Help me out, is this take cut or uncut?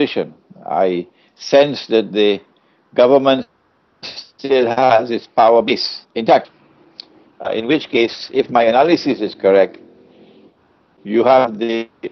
uncut